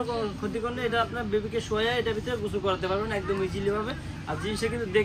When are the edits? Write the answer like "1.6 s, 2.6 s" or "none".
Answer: none